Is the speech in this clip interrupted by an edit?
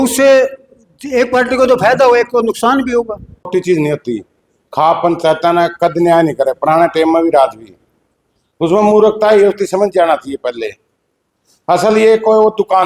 no; 0 cuts

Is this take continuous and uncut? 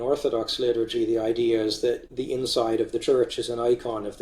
no; 1 cut; at 2.1 s

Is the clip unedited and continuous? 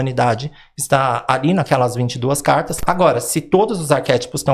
no; 1 cut; at 2.8 s

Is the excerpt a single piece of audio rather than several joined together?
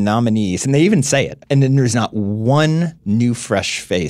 no; 2 cuts; at 1.4 s, 3.0 s

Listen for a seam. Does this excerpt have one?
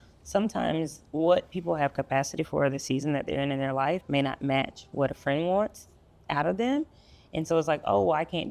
no; 0 cuts

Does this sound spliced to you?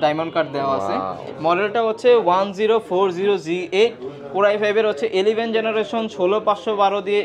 no; 0 cuts

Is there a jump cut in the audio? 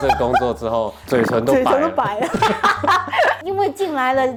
no; 0 cuts

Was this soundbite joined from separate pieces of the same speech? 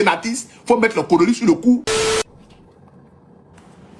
yes; 1 cut; at 2.0 s

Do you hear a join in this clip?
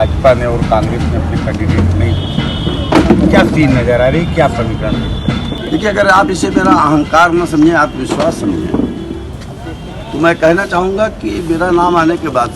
yes; 1 cut; at 5.6 s

